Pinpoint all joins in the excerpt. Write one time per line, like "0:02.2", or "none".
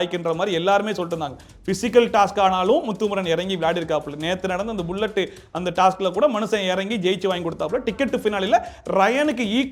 none